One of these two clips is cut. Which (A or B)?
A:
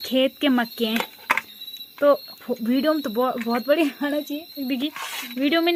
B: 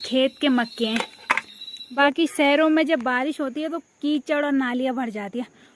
B